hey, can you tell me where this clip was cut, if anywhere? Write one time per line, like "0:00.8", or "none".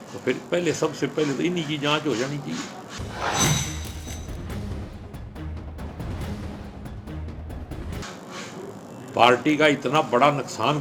none